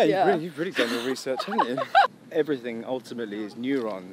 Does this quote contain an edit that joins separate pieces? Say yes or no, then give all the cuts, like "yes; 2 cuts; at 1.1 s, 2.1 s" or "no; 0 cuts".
yes; 1 cut; at 2.1 s